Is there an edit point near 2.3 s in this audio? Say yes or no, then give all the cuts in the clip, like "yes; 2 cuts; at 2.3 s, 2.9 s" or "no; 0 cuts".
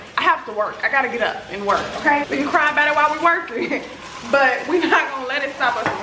yes; 1 cut; at 2.3 s